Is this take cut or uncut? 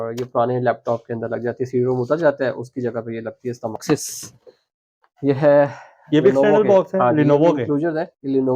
cut